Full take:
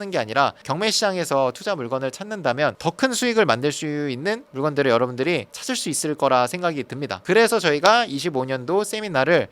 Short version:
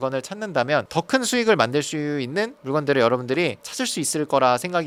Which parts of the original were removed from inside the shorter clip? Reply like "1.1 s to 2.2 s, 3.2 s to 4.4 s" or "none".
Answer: none

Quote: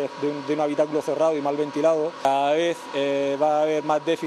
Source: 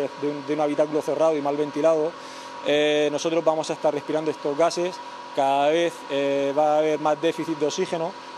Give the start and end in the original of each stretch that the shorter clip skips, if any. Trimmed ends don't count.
2.2 s to 5.3 s

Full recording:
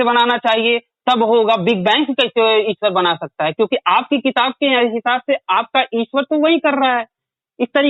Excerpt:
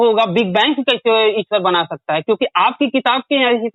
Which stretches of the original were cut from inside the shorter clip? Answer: none

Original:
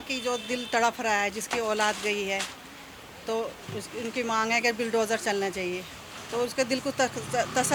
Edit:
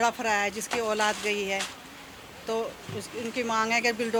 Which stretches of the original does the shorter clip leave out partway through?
none

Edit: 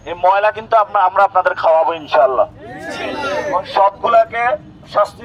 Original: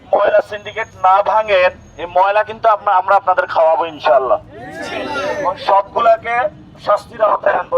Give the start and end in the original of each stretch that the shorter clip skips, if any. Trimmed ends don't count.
none

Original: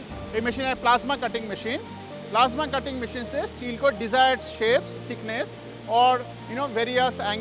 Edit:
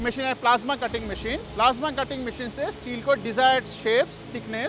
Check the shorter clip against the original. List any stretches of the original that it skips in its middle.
1.9 s to 2.2 s

